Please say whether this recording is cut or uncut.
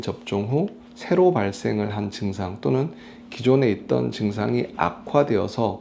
uncut